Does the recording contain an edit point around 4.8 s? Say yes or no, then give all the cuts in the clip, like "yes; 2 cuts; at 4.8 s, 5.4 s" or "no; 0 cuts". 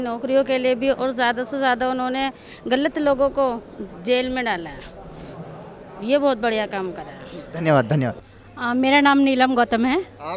no; 0 cuts